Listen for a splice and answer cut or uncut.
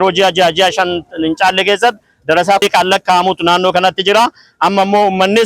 cut